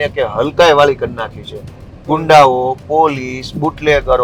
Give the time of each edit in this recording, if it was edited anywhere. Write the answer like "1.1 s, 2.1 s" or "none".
none